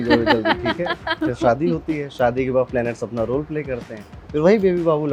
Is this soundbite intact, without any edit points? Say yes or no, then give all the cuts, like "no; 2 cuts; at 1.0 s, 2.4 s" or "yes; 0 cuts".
yes; 0 cuts